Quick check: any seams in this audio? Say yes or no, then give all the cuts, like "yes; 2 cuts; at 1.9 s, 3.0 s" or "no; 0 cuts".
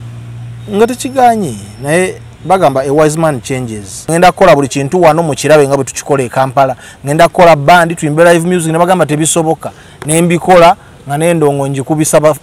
yes; 1 cut; at 4.1 s